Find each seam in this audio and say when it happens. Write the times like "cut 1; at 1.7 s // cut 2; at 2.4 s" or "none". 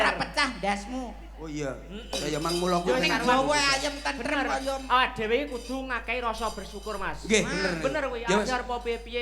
none